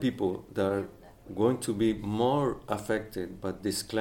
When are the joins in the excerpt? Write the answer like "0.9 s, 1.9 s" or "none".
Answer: none